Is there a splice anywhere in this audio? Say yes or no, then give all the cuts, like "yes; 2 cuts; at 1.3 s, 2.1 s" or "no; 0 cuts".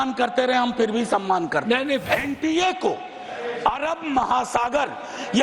yes; 1 cut; at 2.0 s